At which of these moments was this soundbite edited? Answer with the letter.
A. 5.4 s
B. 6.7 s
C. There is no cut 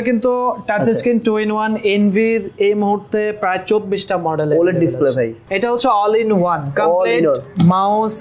A